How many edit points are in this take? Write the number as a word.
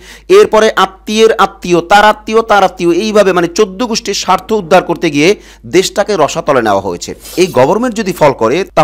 one